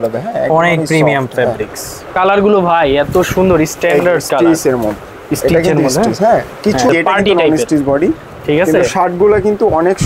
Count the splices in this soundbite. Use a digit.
2